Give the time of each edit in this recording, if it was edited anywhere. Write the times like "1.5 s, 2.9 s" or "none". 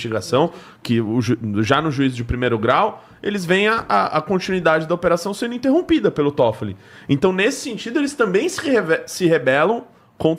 none